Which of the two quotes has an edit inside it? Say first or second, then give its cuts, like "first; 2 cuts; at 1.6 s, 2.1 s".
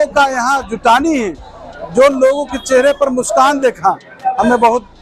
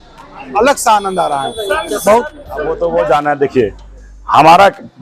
second; 1 cut; at 2.7 s